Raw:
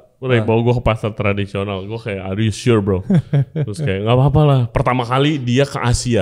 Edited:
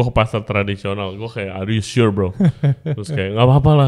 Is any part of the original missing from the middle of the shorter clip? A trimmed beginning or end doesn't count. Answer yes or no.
no